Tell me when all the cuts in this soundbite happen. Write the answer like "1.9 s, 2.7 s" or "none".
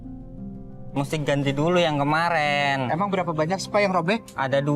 0.9 s